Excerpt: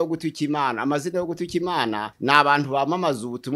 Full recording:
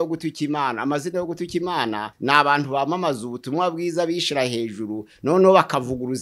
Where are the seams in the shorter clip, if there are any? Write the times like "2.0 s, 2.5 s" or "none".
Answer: none

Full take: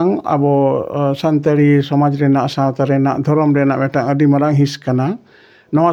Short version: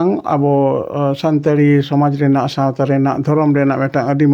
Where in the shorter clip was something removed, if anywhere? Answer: none

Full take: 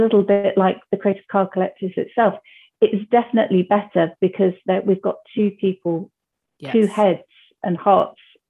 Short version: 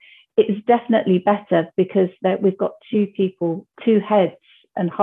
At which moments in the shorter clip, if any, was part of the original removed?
3.7 s

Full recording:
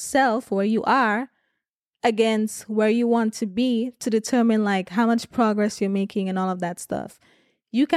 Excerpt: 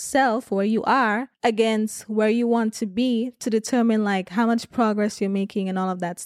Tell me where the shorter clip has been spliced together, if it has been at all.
1.3 s

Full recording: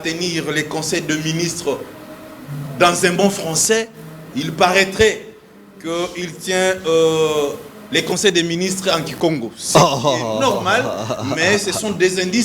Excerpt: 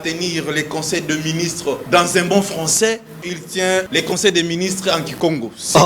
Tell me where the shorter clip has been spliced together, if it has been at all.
1.8 s, 3.6 s

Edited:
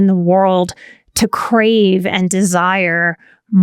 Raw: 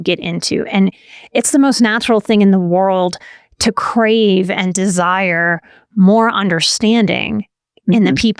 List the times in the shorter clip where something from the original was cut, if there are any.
none

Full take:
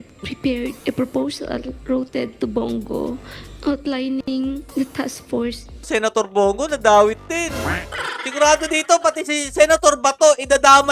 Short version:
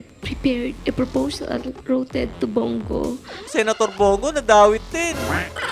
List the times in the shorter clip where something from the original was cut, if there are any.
3.3 s

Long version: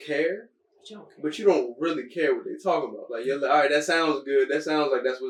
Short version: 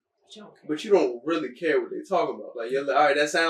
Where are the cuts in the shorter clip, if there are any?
none

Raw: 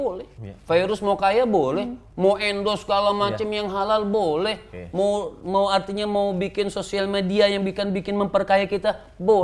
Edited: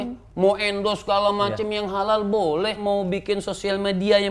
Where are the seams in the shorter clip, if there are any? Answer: 2.8 s

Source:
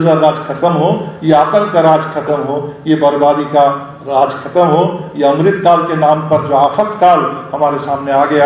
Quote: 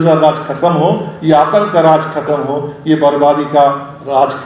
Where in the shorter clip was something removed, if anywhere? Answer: none

